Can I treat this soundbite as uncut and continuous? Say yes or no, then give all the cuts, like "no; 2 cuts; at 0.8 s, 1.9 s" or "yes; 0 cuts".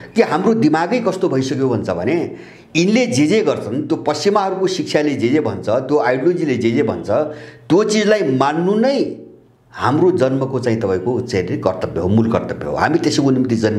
yes; 0 cuts